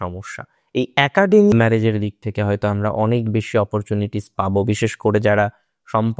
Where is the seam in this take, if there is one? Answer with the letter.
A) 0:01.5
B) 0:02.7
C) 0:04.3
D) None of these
A